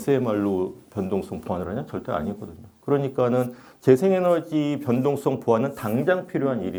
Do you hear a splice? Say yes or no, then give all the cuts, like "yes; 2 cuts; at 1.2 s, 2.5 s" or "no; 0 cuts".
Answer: no; 0 cuts